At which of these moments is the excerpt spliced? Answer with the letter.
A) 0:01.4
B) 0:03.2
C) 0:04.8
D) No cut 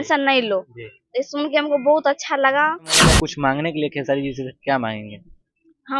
B